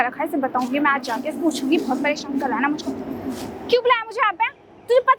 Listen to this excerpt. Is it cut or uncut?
uncut